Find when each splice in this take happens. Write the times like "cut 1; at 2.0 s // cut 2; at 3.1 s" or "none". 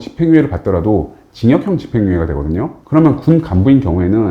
cut 1; at 2.8 s